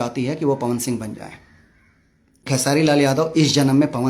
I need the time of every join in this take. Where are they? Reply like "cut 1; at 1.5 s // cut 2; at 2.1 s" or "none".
cut 1; at 2.7 s